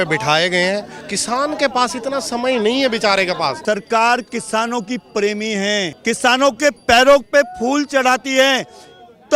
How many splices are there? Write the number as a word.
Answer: two